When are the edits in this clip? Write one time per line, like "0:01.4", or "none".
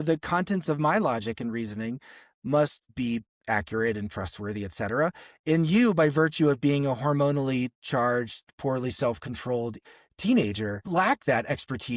0:09.8
0:10.8